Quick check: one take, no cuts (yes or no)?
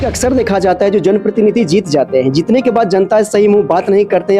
yes